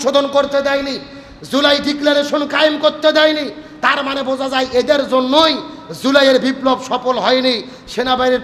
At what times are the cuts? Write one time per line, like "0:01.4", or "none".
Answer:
none